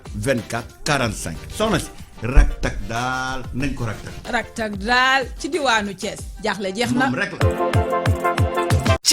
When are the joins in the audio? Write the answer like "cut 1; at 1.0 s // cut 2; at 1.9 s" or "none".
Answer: cut 1; at 1.1 s